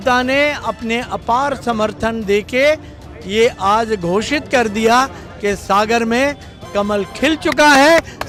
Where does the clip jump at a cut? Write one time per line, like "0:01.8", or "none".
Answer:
none